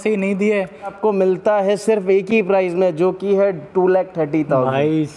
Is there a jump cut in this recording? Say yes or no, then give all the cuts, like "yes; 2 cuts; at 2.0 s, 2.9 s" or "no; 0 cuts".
yes; 1 cut; at 0.9 s